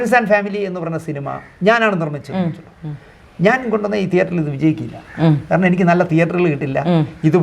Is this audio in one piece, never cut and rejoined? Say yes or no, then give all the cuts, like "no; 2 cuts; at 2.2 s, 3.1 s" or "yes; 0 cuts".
yes; 0 cuts